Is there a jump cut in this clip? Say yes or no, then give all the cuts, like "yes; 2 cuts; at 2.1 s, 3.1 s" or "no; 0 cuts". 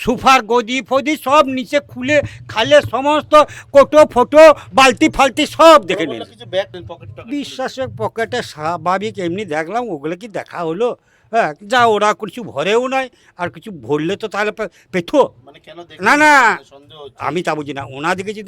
yes; 1 cut; at 6.7 s